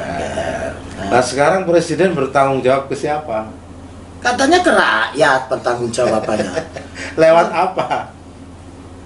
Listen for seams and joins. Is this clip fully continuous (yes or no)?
no